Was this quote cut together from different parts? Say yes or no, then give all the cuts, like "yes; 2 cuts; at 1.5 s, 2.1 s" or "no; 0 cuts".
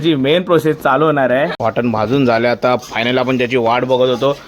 yes; 1 cut; at 1.5 s